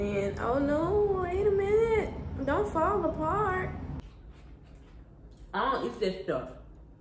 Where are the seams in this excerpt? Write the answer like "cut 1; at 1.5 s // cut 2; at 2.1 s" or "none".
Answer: cut 1; at 4.0 s